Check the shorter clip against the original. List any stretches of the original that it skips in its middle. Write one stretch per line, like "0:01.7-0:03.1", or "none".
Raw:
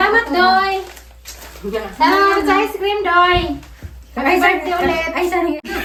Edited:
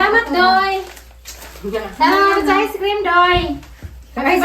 none